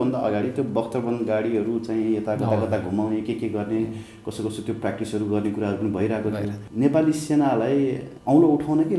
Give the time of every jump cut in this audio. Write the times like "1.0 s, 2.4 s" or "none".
6.6 s, 8.1 s